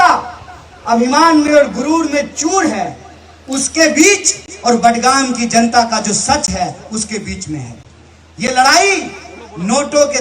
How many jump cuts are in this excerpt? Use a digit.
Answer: 0